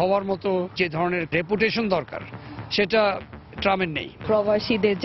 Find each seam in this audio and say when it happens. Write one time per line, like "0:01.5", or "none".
0:01.2
0:04.2